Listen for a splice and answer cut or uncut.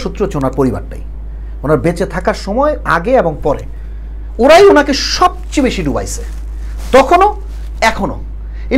uncut